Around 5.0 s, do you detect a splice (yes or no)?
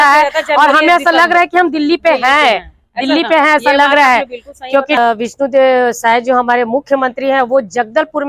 yes